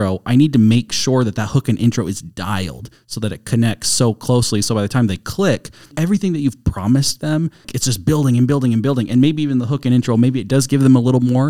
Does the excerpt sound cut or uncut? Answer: cut